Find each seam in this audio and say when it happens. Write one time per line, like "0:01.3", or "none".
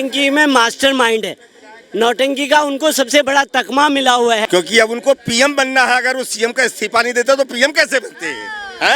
0:04.4